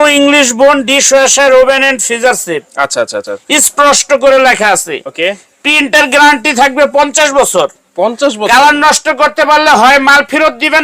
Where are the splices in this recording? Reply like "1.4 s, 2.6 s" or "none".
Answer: none

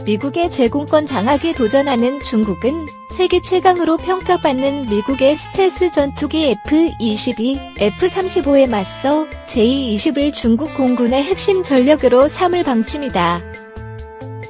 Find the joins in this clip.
13.4 s

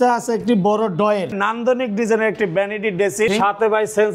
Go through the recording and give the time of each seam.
1.3 s, 3.3 s

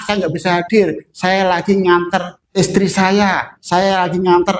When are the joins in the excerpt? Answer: 2.4 s

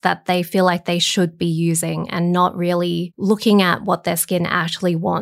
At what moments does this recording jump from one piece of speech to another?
3.1 s

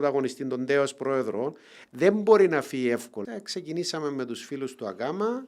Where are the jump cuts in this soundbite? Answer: 3.2 s

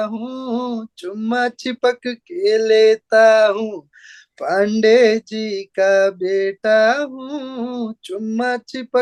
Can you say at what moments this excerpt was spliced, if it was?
none

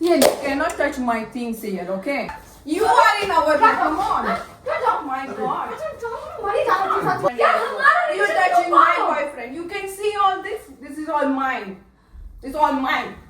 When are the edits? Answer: 2.4 s, 7.3 s

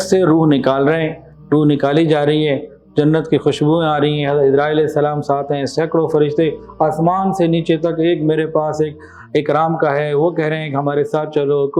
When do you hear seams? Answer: none

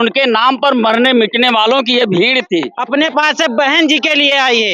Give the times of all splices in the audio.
2.8 s

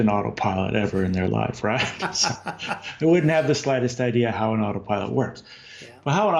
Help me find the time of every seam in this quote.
none

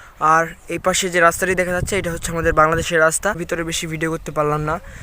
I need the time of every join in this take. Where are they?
3.4 s

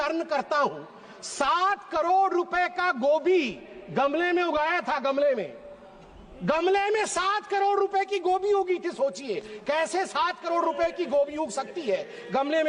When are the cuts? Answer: none

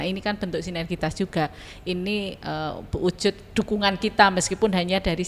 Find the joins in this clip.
none

